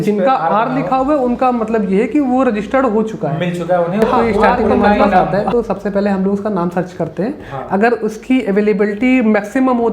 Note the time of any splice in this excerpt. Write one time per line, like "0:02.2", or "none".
0:05.3